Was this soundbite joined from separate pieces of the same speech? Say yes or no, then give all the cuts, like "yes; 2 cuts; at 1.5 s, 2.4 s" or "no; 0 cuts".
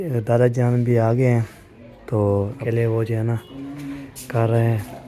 yes; 1 cut; at 2.6 s